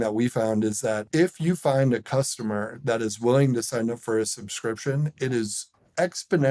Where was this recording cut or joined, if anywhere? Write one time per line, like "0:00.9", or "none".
0:01.0